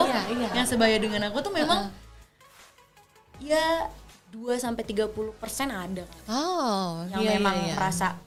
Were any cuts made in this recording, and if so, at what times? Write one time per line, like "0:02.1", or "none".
none